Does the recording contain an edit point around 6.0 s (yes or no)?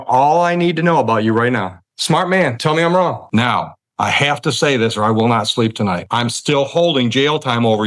yes